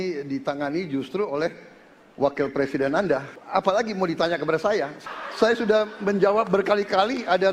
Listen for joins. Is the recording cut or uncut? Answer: cut